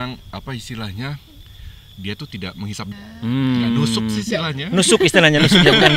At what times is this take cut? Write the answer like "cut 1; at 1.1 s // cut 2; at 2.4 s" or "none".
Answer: cut 1; at 3.0 s